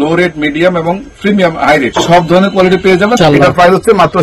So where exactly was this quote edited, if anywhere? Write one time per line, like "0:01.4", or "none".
0:01.9
0:03.1